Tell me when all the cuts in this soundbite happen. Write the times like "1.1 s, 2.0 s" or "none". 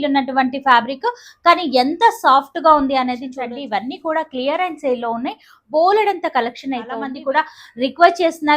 3.3 s, 7.1 s